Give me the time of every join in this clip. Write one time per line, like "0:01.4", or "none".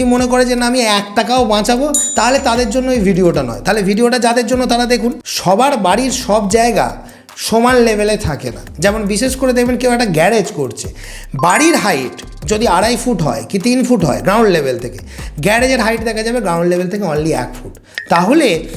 0:05.3